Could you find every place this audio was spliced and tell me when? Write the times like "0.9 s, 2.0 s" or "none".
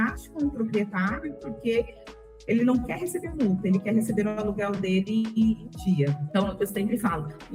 6.2 s